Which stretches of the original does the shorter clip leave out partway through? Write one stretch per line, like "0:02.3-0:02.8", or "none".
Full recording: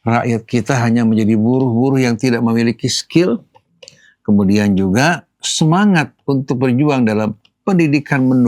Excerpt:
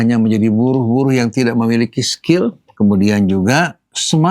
0:03.5-0:04.1

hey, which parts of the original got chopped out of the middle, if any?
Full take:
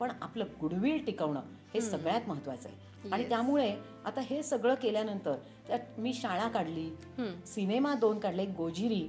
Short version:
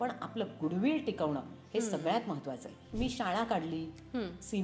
0:02.9-0:05.9

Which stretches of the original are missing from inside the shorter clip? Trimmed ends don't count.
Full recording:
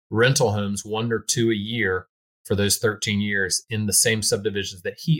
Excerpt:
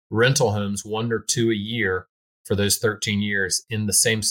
none

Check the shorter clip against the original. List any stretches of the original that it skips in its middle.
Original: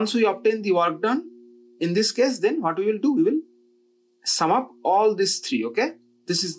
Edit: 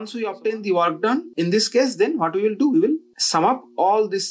0:01.3-0:01.7
0:03.6-0:04.2

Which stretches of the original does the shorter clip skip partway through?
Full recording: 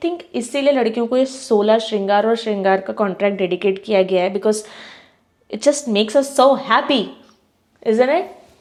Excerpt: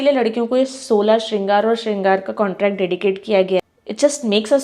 0:04.2-0:05.2

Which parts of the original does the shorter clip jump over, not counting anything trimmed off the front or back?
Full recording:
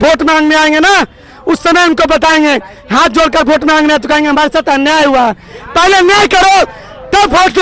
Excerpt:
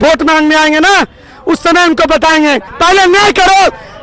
0:02.7-0:05.6

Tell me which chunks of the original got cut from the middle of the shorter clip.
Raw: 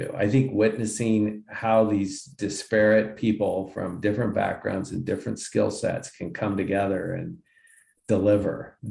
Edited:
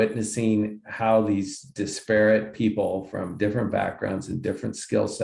none

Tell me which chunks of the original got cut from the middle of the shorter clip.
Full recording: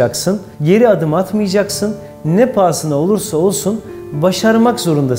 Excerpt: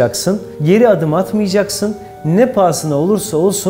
none

